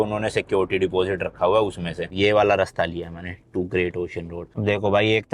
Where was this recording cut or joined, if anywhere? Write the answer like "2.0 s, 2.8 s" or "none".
1.9 s, 4.6 s